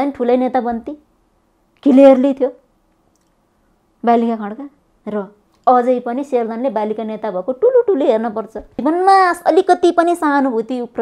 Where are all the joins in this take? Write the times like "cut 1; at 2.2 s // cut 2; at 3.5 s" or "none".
cut 1; at 8.7 s